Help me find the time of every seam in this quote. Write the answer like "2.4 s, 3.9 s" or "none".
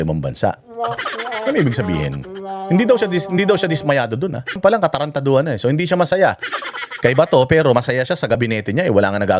4.6 s